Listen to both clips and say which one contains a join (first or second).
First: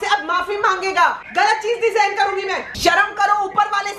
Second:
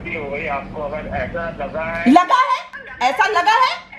first